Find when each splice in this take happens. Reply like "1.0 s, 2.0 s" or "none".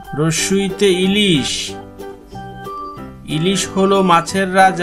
none